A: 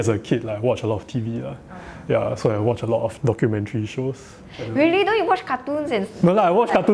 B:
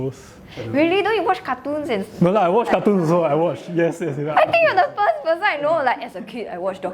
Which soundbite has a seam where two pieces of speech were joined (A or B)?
B